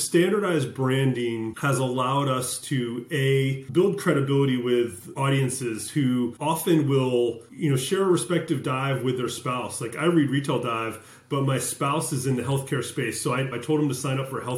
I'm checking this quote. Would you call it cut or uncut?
cut